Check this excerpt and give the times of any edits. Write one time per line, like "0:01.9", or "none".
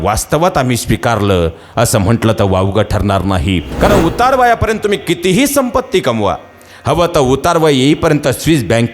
0:03.7